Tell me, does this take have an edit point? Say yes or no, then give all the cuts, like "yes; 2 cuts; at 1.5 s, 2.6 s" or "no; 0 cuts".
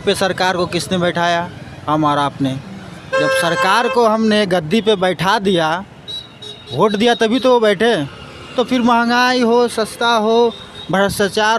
no; 0 cuts